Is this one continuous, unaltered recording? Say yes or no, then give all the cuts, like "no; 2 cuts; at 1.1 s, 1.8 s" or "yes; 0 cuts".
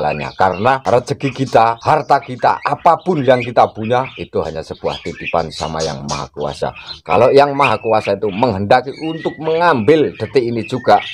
no; 2 cuts; at 0.8 s, 1.8 s